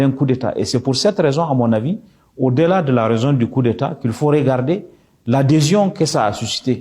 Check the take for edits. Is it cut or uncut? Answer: uncut